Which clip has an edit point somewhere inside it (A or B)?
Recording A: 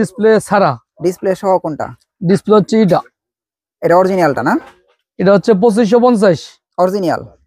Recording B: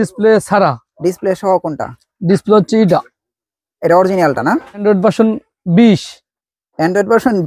B